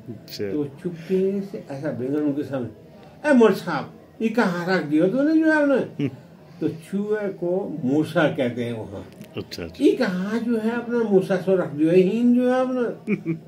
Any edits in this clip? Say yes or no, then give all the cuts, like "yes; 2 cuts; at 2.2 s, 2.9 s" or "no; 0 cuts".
no; 0 cuts